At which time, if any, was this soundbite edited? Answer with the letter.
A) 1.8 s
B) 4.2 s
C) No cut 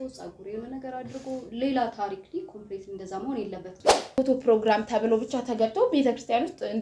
B